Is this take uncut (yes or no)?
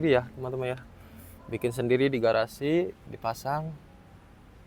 yes